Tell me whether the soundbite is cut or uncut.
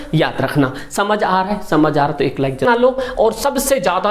cut